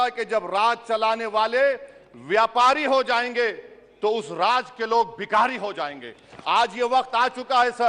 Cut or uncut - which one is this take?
uncut